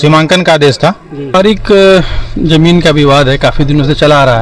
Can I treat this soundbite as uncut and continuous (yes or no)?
no